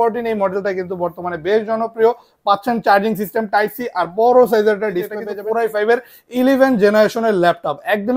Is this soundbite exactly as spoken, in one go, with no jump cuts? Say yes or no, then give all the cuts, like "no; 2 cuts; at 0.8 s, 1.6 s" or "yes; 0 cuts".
no; 1 cut; at 5.3 s